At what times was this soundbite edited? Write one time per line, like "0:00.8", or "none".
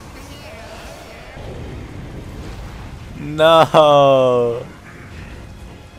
0:01.4
0:03.1